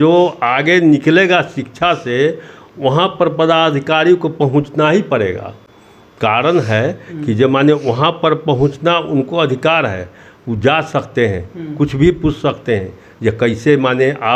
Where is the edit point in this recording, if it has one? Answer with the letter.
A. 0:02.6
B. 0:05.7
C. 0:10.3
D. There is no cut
D